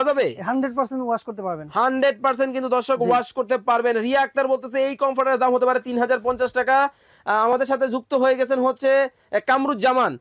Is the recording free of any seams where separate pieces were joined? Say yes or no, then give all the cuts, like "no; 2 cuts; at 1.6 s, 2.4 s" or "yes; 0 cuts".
yes; 0 cuts